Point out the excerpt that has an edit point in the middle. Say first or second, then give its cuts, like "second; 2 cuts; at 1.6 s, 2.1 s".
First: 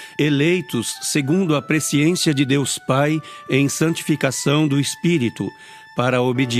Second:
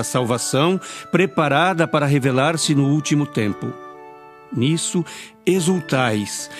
second; 1 cut; at 3.7 s